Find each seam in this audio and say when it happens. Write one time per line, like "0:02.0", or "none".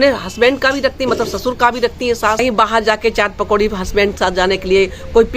0:02.4